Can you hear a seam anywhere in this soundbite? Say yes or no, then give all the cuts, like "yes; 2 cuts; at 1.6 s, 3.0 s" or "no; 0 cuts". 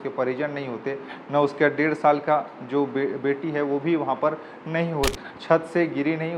yes; 1 cut; at 5.3 s